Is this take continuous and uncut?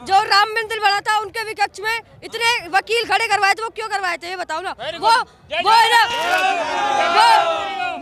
yes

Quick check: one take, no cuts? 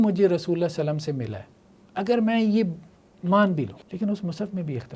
no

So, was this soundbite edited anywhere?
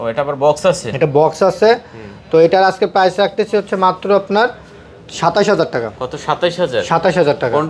no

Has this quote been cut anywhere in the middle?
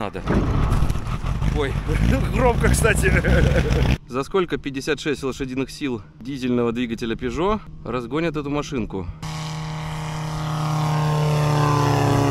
yes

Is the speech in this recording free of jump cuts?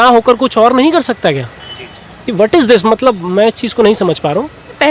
yes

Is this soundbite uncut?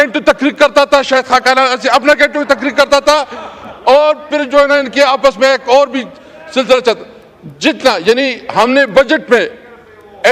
yes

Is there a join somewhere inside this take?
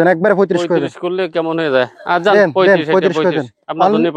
no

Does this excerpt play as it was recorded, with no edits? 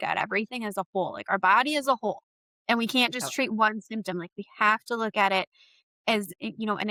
yes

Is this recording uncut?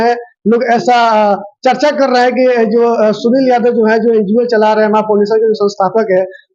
yes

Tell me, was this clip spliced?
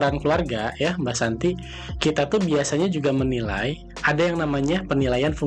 no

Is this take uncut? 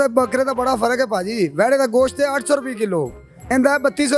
yes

